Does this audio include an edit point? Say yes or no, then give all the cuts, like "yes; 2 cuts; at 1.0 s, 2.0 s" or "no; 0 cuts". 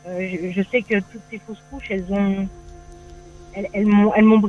no; 0 cuts